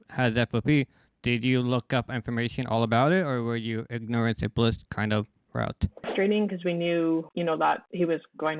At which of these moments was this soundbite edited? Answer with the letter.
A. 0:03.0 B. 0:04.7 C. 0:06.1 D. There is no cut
C